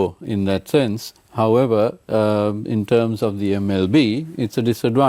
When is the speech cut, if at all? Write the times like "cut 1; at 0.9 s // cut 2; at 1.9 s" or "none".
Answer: none